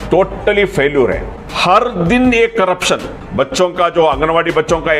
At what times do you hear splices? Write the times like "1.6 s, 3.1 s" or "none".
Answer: 1.3 s, 3.2 s